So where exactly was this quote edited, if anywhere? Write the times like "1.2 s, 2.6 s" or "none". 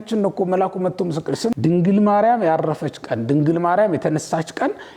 1.5 s